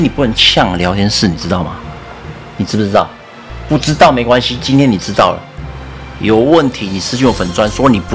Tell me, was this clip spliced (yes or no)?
no